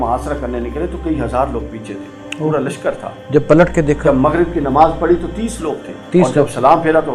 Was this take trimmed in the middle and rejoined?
no; 0 cuts

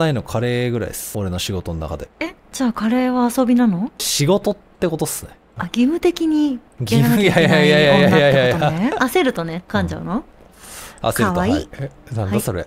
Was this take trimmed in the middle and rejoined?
yes; 4 cuts; at 1.0 s, 2.1 s, 4.1 s, 9.0 s

